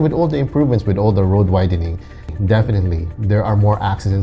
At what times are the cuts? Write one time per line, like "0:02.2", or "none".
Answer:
0:02.3

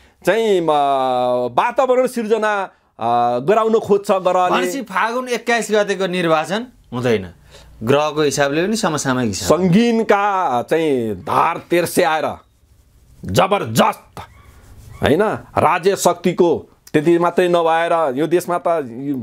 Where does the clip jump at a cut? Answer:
none

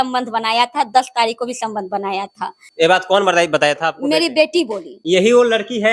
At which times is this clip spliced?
0:02.6
0:04.9

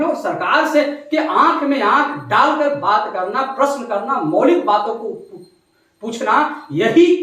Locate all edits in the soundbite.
none

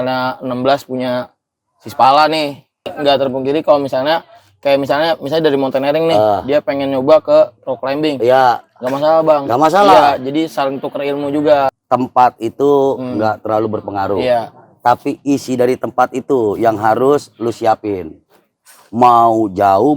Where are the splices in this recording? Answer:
0:02.9
0:11.7

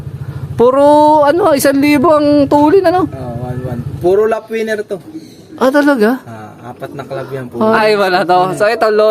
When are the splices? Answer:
0:07.8

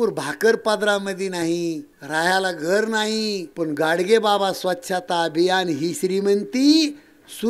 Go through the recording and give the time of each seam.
0:01.9
0:03.5

